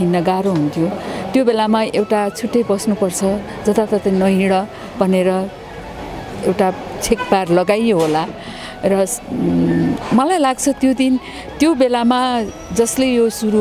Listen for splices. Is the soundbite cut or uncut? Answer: uncut